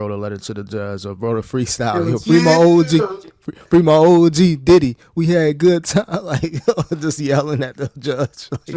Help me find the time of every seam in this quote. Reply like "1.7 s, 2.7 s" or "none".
none